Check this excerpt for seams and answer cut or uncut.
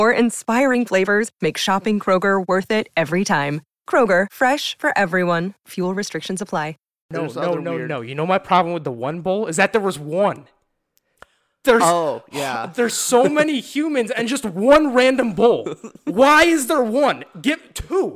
cut